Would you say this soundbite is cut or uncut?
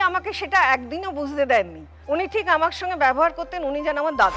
uncut